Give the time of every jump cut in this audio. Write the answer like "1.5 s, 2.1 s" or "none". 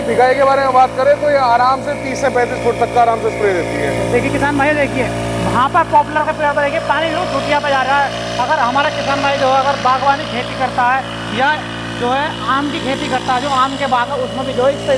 none